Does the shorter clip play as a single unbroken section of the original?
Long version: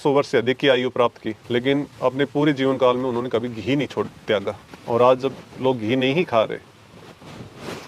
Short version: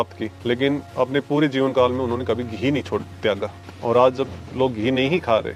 yes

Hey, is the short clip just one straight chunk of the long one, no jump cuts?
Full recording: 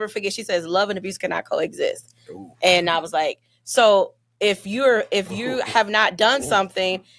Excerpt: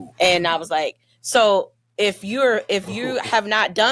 yes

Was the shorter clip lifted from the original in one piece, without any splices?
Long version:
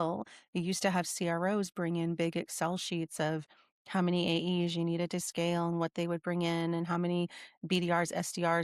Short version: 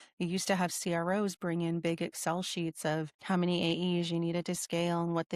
no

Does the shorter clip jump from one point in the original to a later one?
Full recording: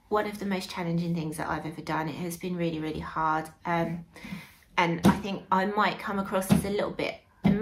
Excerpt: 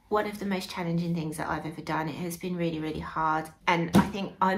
yes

